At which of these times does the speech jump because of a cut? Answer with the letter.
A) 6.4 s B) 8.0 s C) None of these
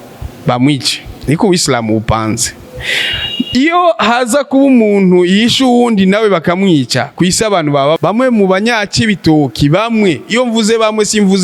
B